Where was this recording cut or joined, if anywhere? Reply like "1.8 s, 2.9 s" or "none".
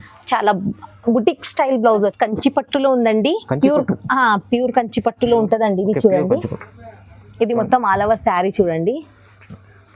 2.1 s

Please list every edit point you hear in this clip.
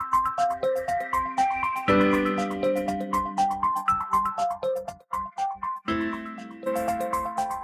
6.6 s

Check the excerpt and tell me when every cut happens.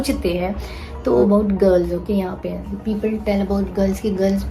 1.2 s

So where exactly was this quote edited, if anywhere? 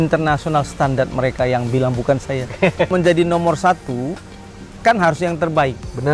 2.9 s

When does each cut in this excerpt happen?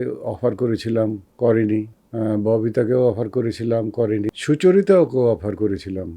1.3 s, 2.0 s, 4.3 s

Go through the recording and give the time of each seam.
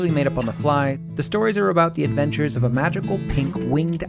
1.0 s

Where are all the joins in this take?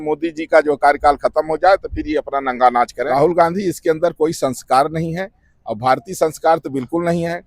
3.0 s

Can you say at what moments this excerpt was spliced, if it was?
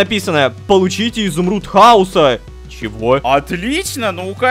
none

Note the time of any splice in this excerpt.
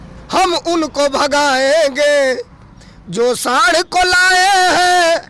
none

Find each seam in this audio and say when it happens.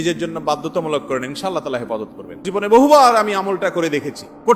2.4 s

